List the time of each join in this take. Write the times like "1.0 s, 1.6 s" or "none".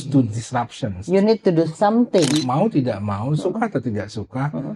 2.4 s

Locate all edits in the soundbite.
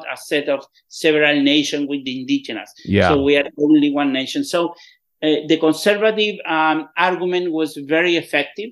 none

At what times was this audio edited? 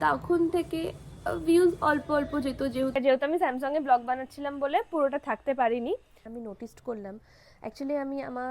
2.9 s, 6.2 s

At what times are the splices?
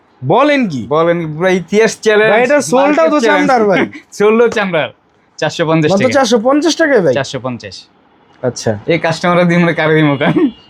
none

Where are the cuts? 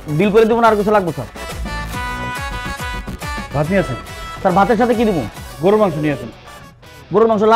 1.3 s, 5.4 s

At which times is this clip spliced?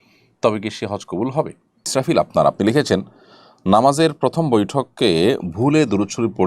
1.8 s

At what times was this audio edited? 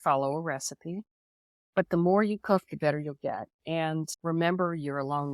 4.1 s

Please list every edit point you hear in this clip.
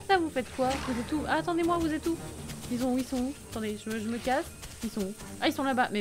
none

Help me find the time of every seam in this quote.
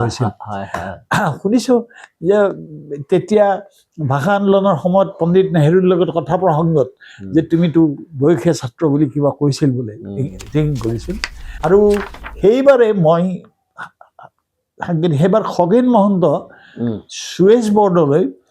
11.6 s

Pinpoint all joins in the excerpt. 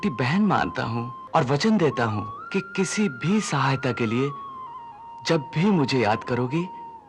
1.2 s, 2.3 s

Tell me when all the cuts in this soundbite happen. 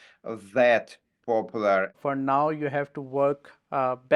2.0 s

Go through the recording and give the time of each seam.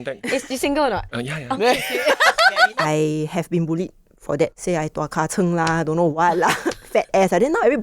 1.1 s, 2.8 s, 4.6 s

